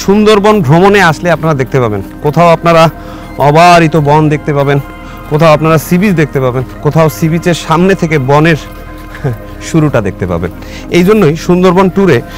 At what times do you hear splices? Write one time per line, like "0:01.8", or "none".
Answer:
none